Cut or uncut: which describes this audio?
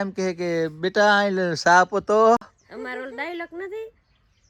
uncut